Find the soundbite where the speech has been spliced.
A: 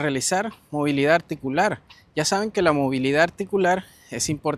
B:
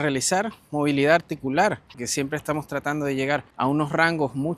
B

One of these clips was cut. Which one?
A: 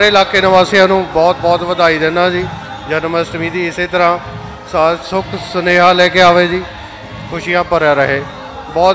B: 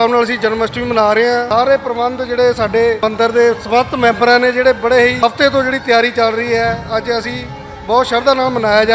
B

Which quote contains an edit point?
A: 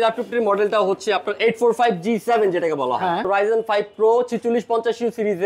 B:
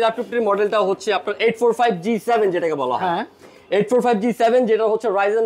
A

